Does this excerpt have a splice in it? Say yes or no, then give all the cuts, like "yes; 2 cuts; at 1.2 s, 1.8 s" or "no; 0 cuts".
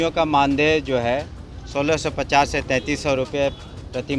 no; 0 cuts